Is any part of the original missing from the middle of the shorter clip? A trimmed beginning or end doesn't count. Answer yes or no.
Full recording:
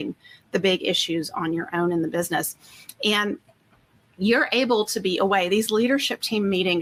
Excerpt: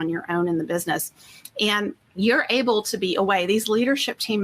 yes